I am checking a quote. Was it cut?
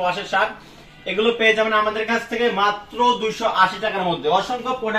no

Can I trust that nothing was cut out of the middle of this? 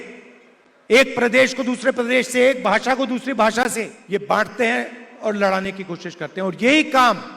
no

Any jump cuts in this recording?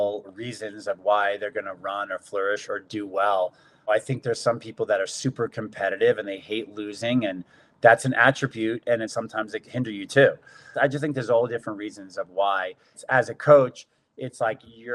yes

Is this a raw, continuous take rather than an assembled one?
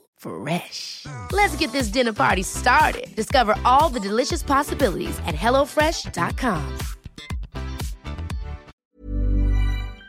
no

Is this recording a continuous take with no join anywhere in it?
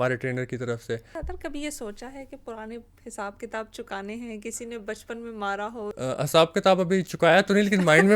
no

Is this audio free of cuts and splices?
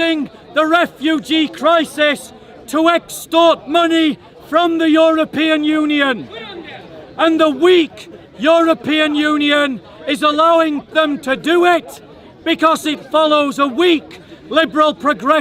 yes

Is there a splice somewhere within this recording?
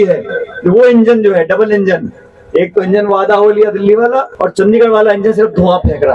yes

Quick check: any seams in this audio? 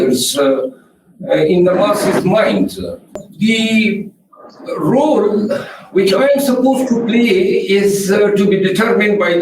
yes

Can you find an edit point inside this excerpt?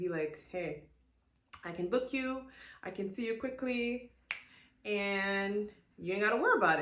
no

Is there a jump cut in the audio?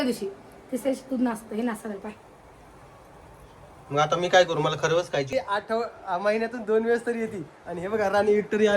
yes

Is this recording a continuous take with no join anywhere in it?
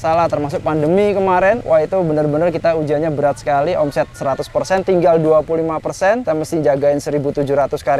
no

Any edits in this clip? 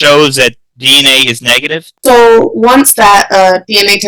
yes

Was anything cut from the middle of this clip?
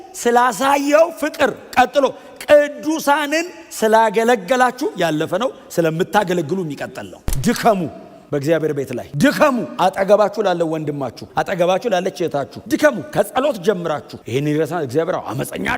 yes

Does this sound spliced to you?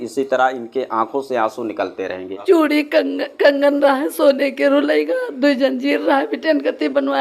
yes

